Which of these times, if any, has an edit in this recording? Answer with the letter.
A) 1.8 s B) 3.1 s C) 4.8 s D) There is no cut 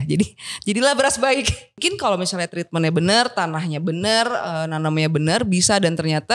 A